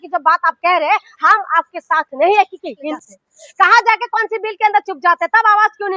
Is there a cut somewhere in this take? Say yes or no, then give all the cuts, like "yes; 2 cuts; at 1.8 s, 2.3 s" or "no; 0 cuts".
yes; 1 cut; at 2.9 s